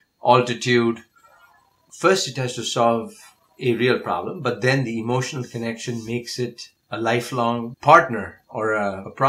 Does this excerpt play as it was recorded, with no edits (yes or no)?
no